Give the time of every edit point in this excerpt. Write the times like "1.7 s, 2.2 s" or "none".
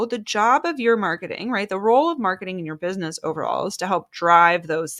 none